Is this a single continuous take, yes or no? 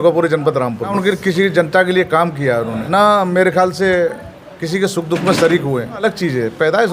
no